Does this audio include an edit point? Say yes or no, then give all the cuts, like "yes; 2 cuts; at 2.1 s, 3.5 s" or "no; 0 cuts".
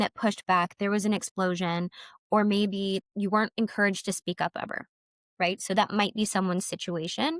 yes; 1 cut; at 3.0 s